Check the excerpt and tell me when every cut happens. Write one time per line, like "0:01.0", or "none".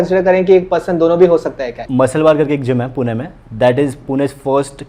0:01.8